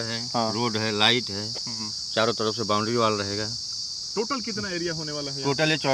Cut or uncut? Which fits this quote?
uncut